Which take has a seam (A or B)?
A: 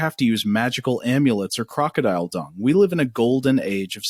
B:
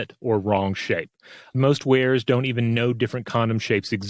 B